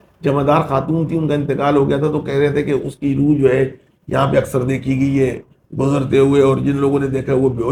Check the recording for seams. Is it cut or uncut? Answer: uncut